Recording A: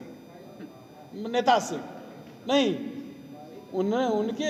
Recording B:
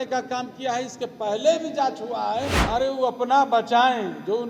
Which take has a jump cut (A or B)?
B